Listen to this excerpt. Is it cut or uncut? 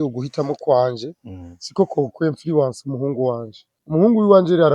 cut